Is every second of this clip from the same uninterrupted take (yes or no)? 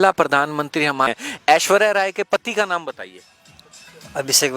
no